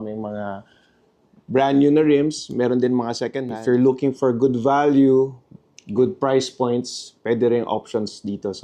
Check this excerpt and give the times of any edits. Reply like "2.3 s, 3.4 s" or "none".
3.5 s, 5.6 s